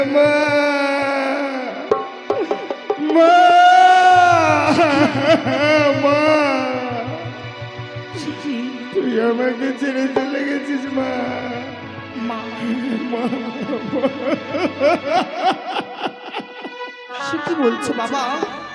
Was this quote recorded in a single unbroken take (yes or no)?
yes